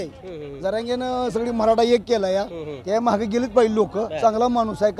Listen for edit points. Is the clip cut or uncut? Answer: cut